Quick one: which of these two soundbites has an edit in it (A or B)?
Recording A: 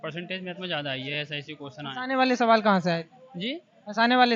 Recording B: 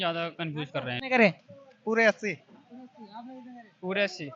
B